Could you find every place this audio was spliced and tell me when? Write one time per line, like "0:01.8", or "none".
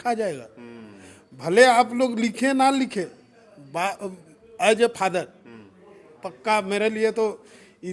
none